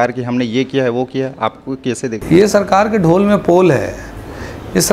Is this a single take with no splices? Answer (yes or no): yes